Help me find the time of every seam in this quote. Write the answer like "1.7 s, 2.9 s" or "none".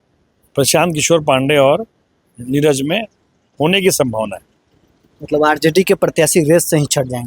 none